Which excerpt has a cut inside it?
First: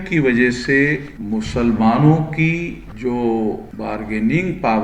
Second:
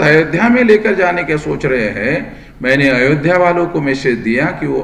first; 3 cuts; at 1.1 s, 2.9 s, 3.7 s

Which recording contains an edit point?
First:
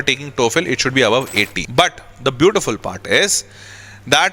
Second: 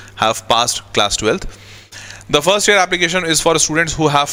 first; 1 cut; at 1.6 s

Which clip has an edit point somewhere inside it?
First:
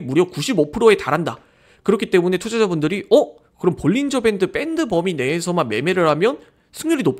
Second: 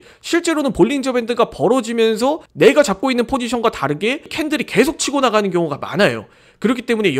second; 1 cut; at 4.3 s

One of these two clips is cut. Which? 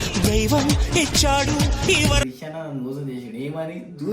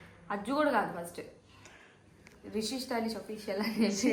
first; 1 cut; at 2.2 s

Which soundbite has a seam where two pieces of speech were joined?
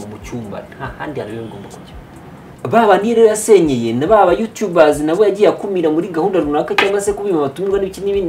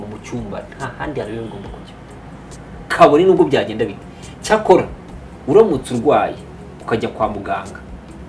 first; 1 cut; at 2.5 s

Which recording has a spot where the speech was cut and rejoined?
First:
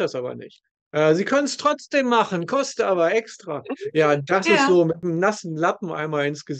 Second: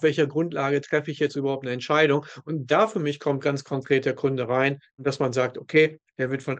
first; 1 cut; at 5.0 s

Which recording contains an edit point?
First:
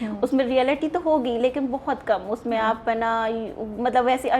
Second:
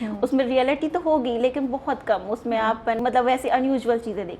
second; 1 cut; at 3.0 s

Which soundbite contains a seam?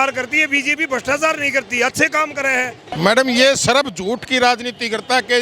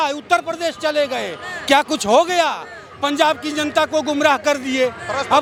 first; 1 cut; at 2.9 s

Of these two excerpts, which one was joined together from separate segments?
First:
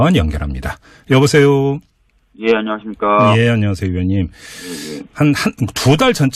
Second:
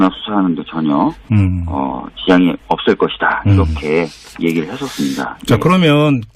first; 1 cut; at 3.6 s

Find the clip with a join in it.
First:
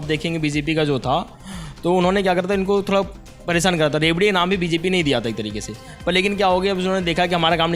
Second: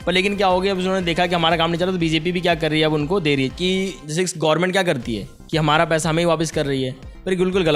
second; 1 cut; at 3.5 s

